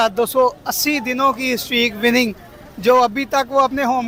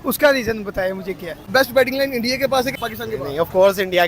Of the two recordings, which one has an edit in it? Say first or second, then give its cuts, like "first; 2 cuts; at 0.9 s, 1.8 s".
second; 2 cuts; at 1.5 s, 2.8 s